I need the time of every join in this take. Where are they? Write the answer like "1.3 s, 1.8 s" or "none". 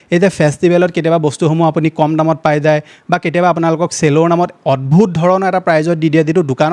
none